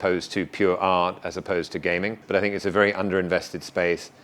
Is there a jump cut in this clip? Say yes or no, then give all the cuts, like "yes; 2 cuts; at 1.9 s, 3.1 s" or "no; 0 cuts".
yes; 1 cut; at 2.2 s